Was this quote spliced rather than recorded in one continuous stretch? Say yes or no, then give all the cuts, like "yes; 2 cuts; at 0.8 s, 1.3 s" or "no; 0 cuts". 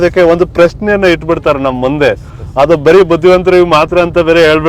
no; 0 cuts